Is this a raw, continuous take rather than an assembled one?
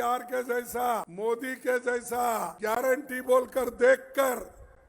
no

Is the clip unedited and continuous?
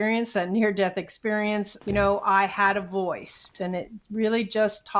no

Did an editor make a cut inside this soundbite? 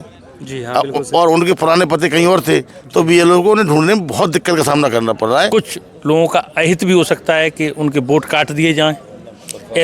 yes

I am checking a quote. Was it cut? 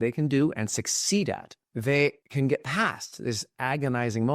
yes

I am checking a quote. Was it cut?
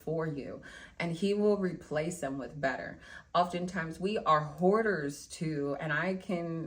no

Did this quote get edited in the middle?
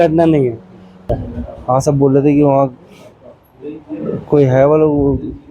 yes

